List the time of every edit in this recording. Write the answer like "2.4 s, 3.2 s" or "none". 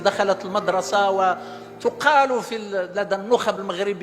none